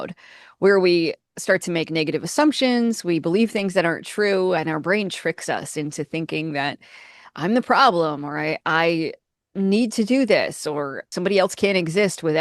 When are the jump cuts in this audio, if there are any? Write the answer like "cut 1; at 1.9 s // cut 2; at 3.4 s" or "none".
cut 1; at 11.0 s